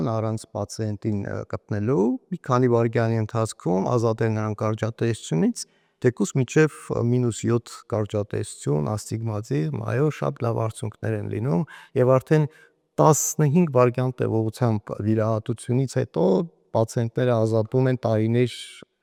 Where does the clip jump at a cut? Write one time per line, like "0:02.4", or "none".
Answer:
none